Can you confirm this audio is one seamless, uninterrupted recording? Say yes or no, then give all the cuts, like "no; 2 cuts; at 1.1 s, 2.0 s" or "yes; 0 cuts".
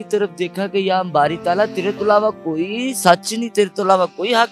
yes; 0 cuts